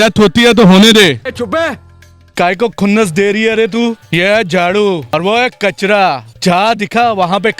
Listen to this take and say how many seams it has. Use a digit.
4